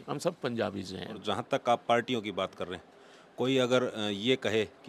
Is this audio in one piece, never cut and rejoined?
no; 1 cut; at 1.2 s

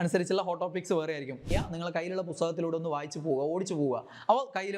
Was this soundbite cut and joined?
yes; 1 cut; at 1.5 s

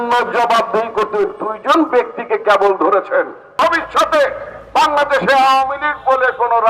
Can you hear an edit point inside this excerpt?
yes; 1 cut; at 3.4 s

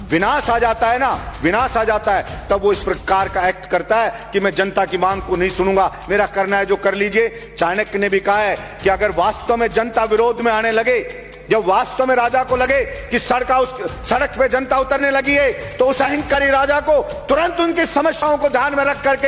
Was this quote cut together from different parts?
no; 0 cuts

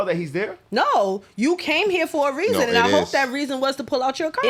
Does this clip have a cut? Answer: no; 0 cuts

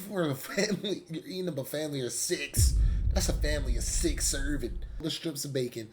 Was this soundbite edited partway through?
yes; 1 cut; at 5.0 s

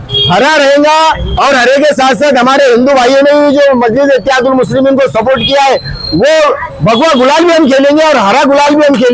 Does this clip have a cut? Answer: no; 0 cuts

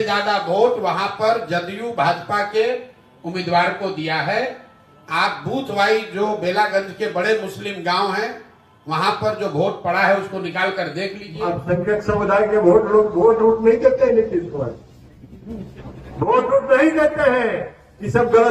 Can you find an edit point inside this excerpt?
yes; 1 cut; at 11.2 s

